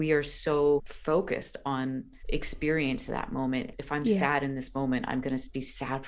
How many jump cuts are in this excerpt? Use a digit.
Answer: 3